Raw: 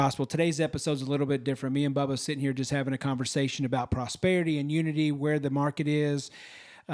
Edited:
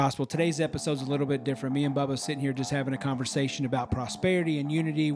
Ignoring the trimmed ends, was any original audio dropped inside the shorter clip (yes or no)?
no